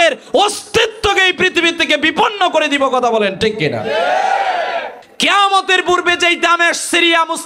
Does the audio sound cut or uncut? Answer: cut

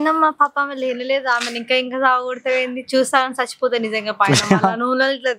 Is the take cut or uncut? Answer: uncut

